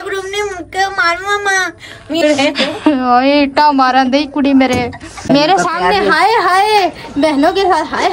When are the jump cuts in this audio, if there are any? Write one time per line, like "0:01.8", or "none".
0:02.2
0:05.3

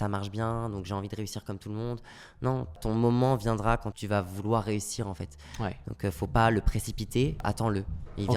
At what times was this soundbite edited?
0:02.8
0:03.9
0:07.4

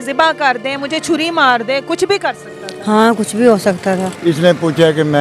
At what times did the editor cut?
0:04.1

